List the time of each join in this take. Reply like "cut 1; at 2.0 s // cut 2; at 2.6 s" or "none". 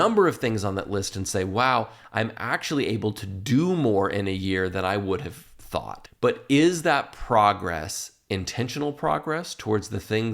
cut 1; at 6.0 s